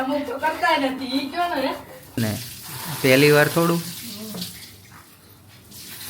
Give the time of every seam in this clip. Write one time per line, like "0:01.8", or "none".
0:02.2